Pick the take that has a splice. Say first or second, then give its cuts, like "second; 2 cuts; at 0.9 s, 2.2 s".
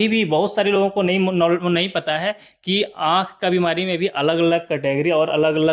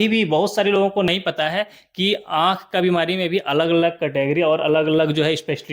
second; 1 cut; at 1.1 s